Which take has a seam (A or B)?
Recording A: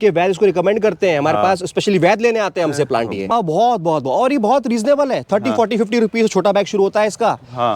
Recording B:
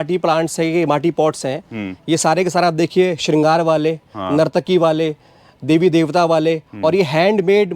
A